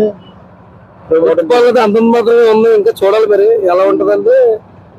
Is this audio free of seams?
yes; 0 cuts

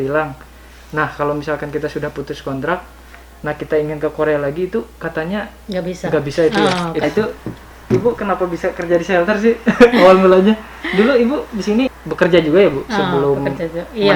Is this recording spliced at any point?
yes; 2 cuts; at 7.0 s, 12.0 s

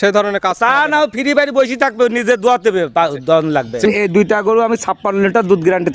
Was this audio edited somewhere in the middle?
yes; 1 cut; at 3.8 s

